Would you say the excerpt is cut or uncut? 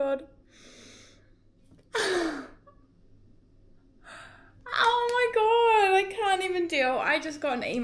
uncut